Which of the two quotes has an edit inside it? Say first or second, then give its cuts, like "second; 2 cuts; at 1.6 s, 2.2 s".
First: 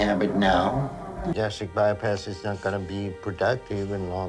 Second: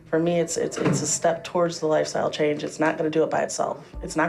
first; 2 cuts; at 1.3 s, 3.0 s